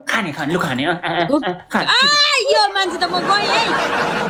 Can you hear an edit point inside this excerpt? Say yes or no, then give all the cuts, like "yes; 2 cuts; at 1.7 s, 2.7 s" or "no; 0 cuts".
no; 0 cuts